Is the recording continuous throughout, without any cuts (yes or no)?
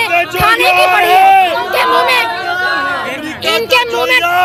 yes